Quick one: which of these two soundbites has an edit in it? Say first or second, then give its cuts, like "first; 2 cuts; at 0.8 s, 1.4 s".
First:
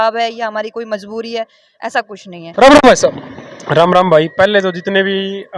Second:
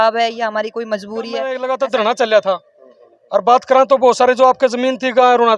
second; 1 cut; at 1.6 s